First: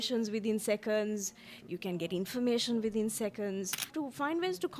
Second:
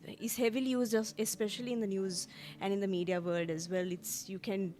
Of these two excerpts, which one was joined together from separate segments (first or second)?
first